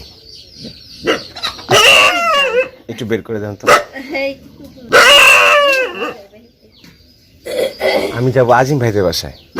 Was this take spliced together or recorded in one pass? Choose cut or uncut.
cut